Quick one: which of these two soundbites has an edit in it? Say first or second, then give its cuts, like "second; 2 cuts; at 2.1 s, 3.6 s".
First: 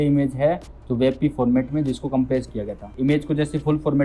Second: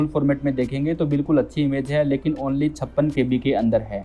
first; 1 cut; at 2.8 s